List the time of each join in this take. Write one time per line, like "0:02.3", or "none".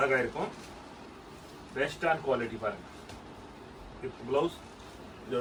none

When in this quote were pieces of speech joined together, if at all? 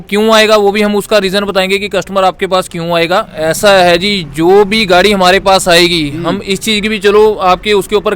0:03.3

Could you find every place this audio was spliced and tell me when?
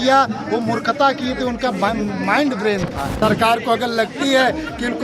0:03.2

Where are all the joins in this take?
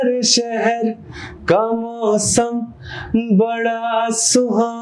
none

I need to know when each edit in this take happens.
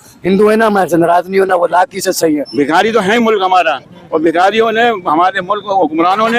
0:02.5

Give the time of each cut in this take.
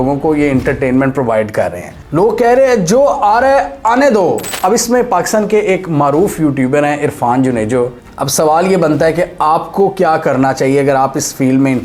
0:01.9
0:04.5
0:07.9

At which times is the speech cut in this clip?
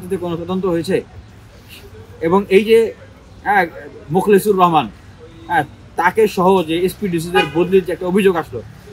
none

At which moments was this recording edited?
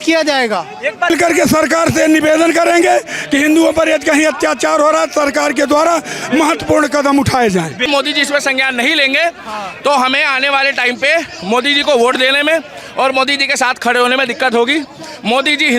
0:01.1
0:07.9

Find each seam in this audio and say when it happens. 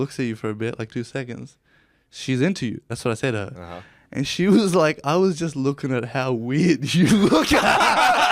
none

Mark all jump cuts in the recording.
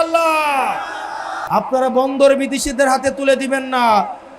0:01.4

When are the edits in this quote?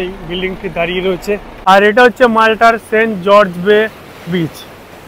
0:01.5

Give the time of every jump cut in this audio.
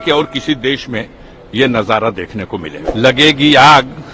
0:02.8

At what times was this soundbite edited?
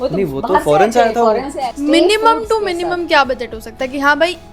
0:01.6

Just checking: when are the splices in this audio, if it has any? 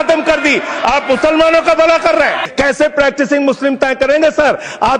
0:02.4

